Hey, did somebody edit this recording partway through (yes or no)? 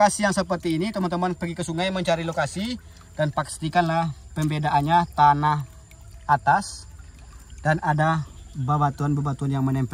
no